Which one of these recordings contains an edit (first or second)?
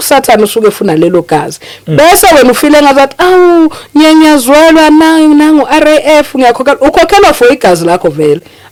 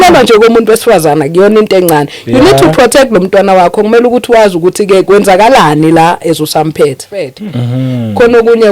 second